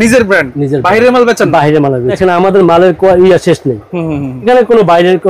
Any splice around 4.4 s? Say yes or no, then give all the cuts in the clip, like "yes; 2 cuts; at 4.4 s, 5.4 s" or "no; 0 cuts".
no; 1 cut; at 2.2 s